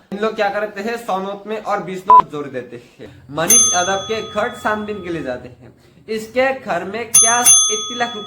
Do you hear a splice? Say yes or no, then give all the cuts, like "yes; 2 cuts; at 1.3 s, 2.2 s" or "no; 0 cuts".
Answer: yes; 1 cut; at 3.0 s